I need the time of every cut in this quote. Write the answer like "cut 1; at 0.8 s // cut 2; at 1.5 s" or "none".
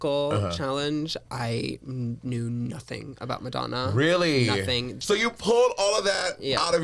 cut 1; at 4.9 s